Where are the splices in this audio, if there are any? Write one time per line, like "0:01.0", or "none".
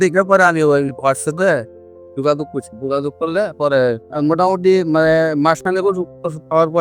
0:04.1